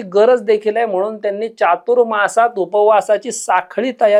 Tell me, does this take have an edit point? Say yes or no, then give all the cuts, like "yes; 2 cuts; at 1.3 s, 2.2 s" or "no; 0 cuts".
no; 0 cuts